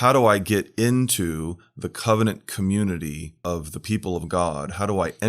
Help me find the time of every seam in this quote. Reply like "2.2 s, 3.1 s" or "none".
3.3 s